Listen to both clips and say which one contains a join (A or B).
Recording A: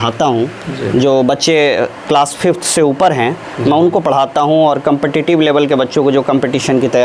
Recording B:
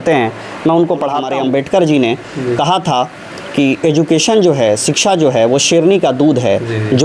B